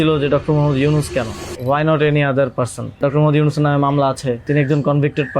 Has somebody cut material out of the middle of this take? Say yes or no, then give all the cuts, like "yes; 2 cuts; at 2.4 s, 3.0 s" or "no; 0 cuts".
yes; 3 cuts; at 1.5 s, 3.0 s, 4.4 s